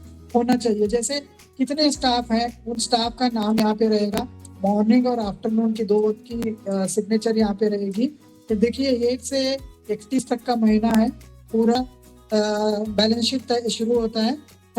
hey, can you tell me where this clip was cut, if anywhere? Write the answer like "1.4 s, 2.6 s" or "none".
11.8 s